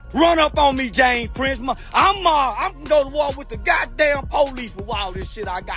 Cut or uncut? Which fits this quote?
uncut